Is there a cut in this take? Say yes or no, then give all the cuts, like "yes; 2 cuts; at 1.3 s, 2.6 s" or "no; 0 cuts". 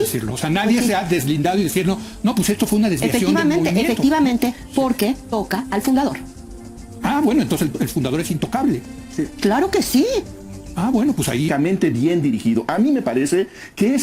yes; 1 cut; at 11.5 s